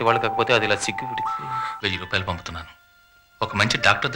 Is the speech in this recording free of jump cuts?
no; 1 cut; at 1.8 s

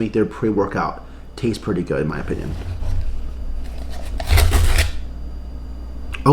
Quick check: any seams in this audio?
yes; 1 cut; at 2.6 s

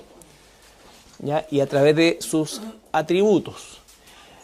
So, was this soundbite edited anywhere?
no; 0 cuts

